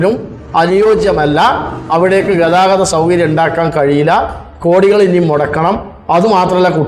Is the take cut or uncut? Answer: uncut